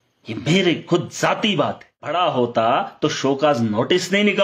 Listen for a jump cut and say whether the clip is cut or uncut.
cut